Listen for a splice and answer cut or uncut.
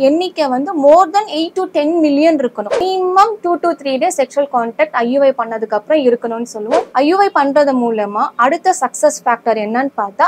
cut